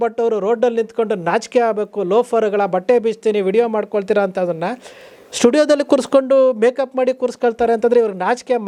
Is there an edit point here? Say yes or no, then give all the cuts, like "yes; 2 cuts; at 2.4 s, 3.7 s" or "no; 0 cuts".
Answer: no; 0 cuts